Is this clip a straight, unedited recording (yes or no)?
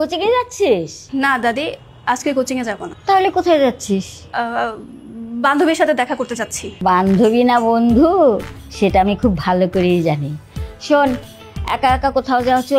no